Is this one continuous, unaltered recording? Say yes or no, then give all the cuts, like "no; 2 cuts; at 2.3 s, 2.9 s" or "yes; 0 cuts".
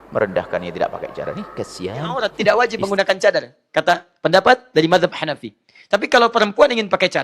no; 1 cut; at 2.3 s